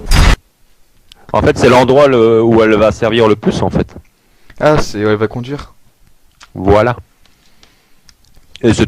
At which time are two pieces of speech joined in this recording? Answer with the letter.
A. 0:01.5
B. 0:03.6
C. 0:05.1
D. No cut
B